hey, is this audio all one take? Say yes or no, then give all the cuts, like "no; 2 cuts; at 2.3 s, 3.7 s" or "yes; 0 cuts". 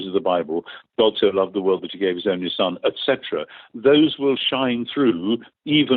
yes; 0 cuts